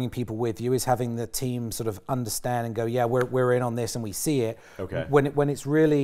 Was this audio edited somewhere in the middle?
no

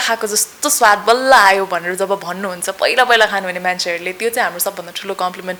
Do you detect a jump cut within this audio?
no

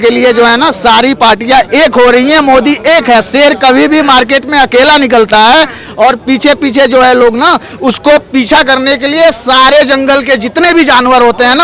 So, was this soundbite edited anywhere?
no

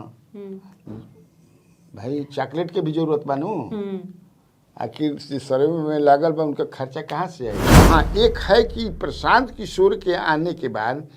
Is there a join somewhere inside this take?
yes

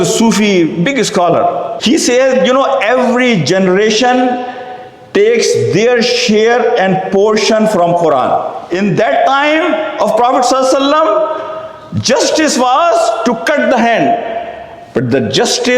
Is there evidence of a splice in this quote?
yes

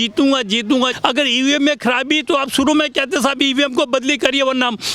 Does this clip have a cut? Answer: yes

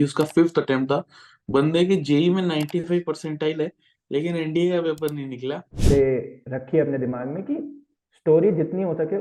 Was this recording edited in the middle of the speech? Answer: yes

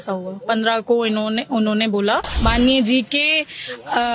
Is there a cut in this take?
yes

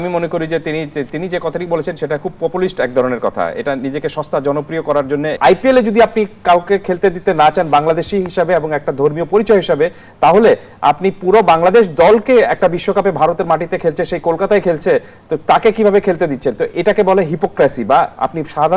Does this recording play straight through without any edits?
no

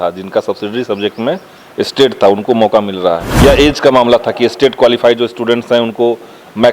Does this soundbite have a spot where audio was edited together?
yes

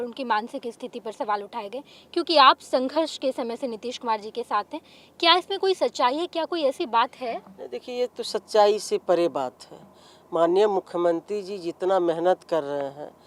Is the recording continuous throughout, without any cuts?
yes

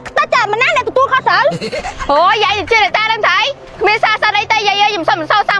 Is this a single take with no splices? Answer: yes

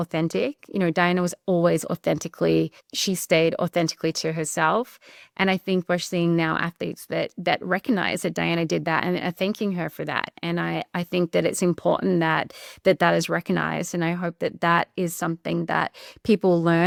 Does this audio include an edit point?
no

